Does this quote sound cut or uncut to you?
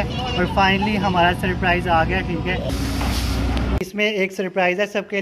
cut